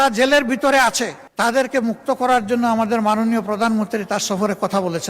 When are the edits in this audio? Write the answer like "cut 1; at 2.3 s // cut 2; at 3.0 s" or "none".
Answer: cut 1; at 1.2 s